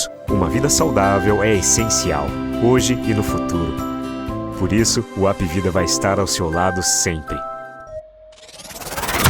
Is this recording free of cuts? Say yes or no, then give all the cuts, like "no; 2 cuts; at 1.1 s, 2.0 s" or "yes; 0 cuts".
no; 1 cut; at 7.8 s